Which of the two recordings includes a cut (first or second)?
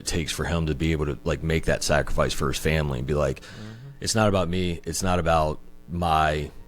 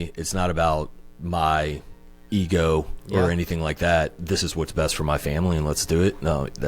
first